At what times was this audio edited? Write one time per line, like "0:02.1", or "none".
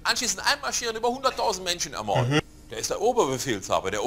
0:02.4